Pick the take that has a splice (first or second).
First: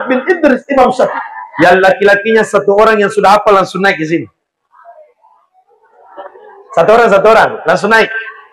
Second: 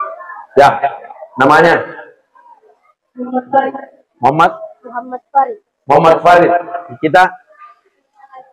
first